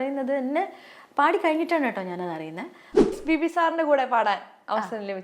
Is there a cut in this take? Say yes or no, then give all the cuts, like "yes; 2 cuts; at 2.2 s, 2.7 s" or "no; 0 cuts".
yes; 1 cut; at 3.1 s